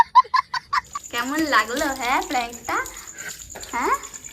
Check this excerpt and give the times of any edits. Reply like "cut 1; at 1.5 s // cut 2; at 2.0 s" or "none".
cut 1; at 1.0 s